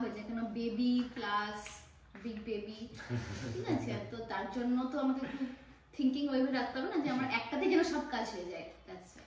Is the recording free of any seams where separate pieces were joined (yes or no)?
yes